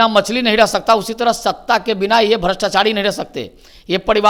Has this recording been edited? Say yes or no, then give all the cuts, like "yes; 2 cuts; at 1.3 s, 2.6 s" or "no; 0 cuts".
no; 0 cuts